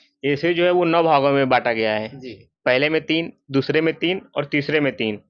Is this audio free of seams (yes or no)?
yes